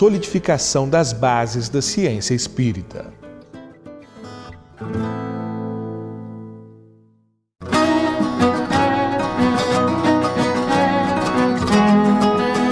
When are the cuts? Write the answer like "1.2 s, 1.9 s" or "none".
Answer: none